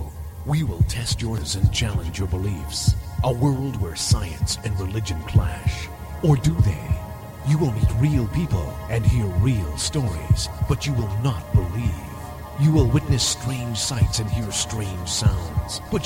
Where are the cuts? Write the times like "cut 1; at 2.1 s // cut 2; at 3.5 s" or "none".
cut 1; at 1.4 s